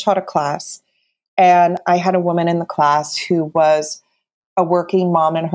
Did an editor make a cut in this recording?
yes; 1 cut; at 4.3 s

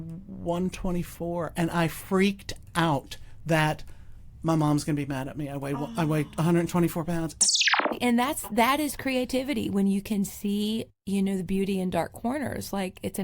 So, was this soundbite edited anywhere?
yes; 1 cut; at 7.6 s

